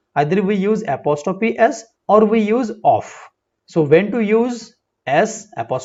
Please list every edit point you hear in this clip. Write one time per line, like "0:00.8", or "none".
none